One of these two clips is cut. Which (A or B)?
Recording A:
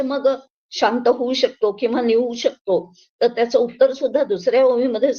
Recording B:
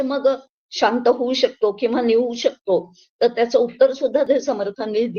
B